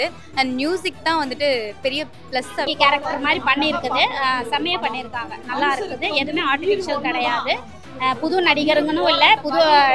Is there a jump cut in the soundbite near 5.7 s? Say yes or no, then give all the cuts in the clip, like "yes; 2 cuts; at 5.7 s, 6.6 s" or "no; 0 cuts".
no; 1 cut; at 2.7 s